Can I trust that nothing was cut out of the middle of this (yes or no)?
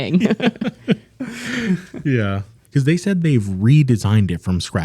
no